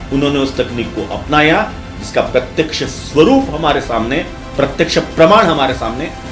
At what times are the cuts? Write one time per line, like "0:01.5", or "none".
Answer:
0:04.4